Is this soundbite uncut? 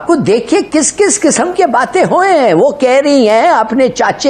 yes; 0 cuts

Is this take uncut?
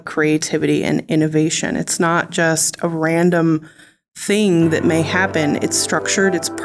yes; 0 cuts

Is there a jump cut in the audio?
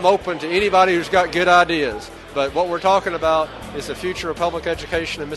yes; 1 cut; at 2.2 s

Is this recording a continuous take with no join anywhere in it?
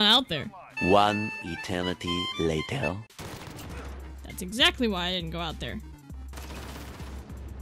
no; 1 cut; at 6.3 s

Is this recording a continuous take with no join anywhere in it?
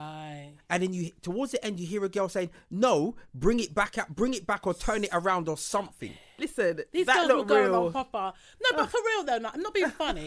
yes; 0 cuts

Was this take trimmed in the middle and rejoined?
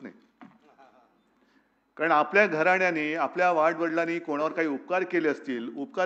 no; 0 cuts

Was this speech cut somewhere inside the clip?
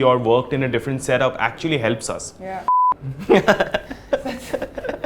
yes; 1 cut; at 2.8 s

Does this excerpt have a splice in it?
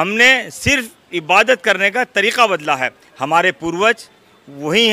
no; 0 cuts

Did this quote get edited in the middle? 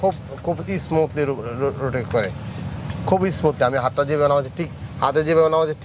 no; 0 cuts

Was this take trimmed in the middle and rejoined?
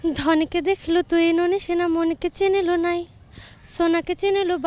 no; 0 cuts

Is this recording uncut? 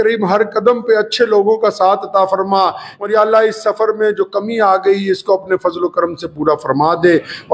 no; 1 cut; at 2.8 s

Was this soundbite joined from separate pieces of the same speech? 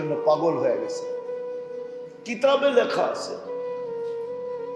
yes; 3 cuts; at 0.8 s, 2.3 s, 3.7 s

